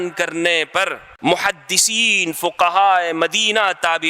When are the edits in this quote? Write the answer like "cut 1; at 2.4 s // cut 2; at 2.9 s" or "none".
cut 1; at 1.0 s